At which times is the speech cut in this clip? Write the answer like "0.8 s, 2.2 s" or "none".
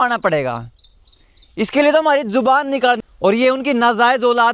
3.0 s